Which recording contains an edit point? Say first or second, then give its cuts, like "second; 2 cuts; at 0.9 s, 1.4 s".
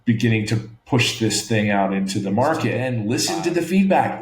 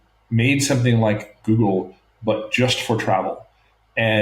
first; 1 cut; at 2.9 s